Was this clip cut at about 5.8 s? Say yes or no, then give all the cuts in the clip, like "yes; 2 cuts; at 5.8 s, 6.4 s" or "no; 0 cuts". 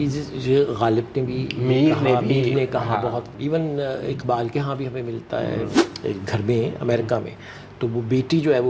yes; 2 cuts; at 3.3 s, 5.8 s